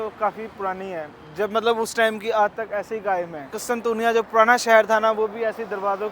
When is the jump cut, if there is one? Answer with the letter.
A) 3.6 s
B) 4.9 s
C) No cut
A